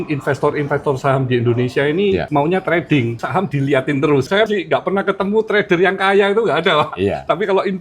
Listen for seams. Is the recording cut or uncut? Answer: cut